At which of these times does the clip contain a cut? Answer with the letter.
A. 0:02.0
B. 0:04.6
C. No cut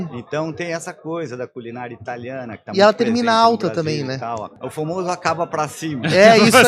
B